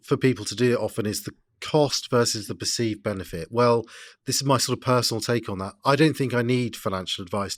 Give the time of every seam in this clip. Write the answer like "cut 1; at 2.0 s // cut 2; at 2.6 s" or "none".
none